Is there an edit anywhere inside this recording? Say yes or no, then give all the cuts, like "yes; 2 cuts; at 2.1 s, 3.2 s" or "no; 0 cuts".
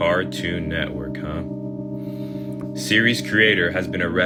no; 0 cuts